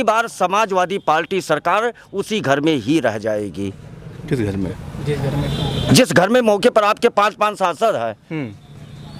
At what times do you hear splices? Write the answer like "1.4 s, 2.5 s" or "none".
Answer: none

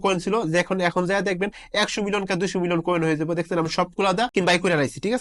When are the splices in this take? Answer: 4.3 s

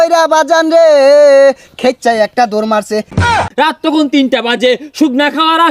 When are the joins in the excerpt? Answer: 3.3 s

